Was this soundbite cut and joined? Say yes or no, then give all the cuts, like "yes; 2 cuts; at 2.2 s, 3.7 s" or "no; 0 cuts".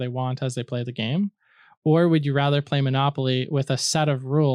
no; 0 cuts